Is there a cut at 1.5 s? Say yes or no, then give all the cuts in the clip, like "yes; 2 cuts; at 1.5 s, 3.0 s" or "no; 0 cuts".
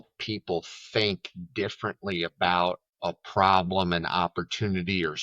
no; 1 cut; at 2.9 s